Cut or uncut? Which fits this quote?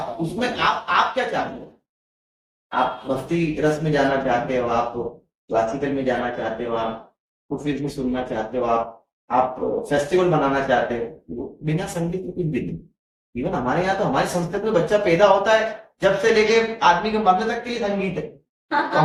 uncut